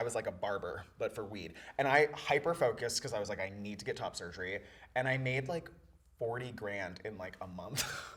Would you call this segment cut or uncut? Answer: uncut